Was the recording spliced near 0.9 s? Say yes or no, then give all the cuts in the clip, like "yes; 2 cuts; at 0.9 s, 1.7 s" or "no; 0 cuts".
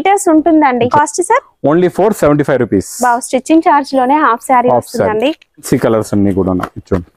yes; 2 cuts; at 0.9 s, 5.7 s